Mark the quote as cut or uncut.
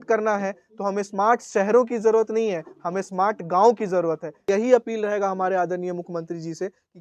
cut